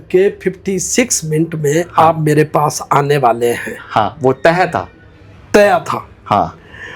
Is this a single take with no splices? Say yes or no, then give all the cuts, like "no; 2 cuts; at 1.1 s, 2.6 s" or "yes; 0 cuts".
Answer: yes; 0 cuts